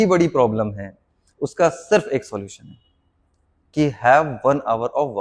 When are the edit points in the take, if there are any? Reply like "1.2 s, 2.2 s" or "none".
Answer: none